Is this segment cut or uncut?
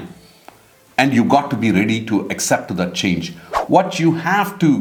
uncut